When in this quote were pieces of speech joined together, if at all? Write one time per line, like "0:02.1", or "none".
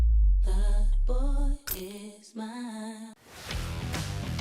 0:03.2